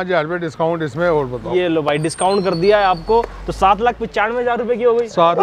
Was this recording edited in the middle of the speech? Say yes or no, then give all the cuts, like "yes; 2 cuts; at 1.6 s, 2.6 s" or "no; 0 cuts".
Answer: no; 0 cuts